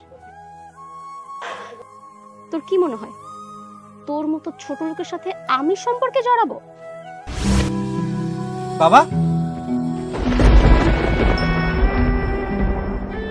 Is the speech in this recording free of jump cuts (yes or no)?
no